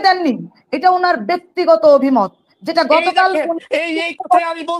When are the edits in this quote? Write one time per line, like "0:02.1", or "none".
none

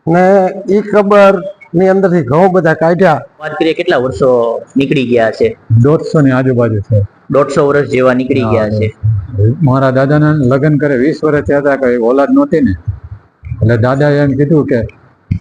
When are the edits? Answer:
0:03.5
0:09.2

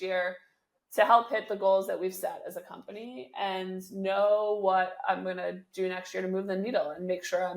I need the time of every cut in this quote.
none

